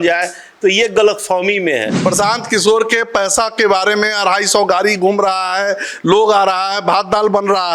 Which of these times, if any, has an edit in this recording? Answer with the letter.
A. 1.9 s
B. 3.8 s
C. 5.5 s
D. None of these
A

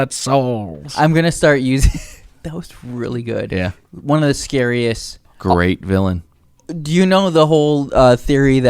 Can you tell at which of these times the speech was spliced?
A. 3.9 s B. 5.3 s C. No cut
B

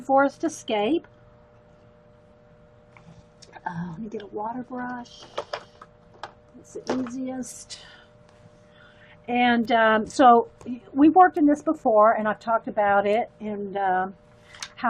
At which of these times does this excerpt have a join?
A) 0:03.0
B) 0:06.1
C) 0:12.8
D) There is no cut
C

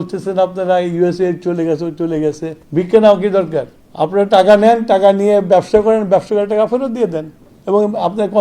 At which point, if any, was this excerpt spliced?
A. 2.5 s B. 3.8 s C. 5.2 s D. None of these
A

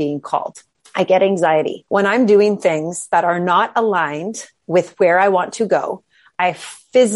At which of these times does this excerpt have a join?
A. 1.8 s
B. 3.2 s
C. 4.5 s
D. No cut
A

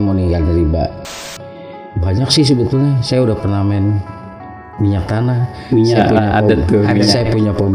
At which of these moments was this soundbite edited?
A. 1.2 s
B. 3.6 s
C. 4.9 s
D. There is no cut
A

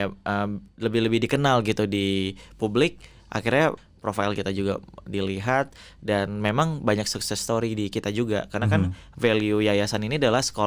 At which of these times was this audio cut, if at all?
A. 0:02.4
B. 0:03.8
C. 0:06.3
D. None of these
B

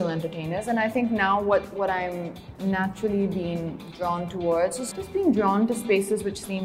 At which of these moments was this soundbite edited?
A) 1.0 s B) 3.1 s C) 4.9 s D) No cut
C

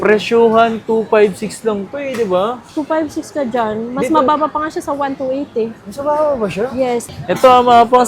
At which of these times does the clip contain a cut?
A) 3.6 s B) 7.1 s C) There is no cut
B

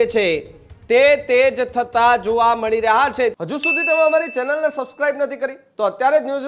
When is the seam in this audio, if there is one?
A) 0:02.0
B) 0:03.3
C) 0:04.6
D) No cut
B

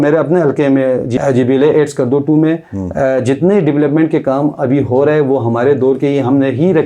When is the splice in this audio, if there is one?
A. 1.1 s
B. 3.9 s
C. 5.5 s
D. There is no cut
A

